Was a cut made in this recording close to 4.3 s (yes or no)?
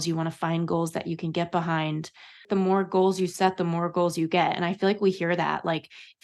no